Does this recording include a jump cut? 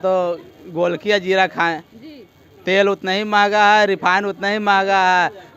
no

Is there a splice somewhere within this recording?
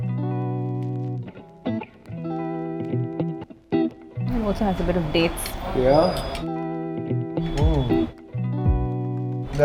no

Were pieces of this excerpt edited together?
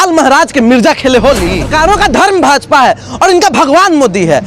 yes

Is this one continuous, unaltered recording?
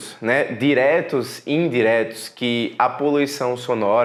yes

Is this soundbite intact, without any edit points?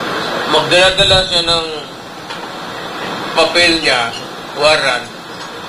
yes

